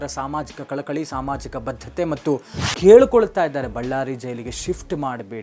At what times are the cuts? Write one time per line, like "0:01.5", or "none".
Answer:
0:02.6